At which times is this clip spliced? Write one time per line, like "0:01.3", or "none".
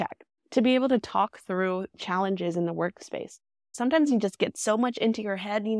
0:03.6